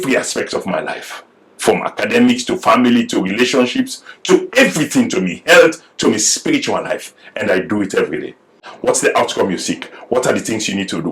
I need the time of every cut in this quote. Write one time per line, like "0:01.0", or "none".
0:08.6